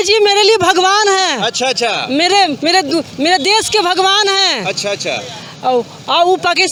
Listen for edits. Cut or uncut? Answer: uncut